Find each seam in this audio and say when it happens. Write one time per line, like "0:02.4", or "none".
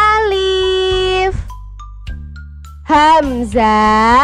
none

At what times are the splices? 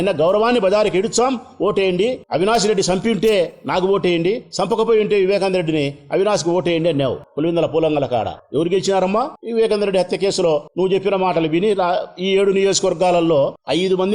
none

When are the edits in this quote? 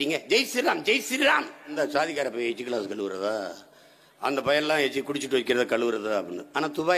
0:01.8

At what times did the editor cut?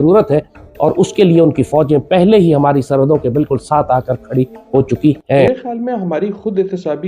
0:05.5

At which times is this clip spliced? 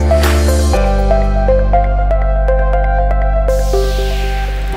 none

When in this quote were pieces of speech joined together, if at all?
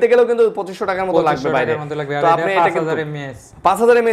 none

